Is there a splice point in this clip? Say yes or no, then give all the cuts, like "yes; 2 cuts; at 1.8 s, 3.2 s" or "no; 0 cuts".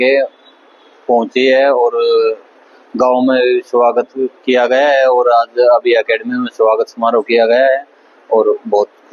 no; 0 cuts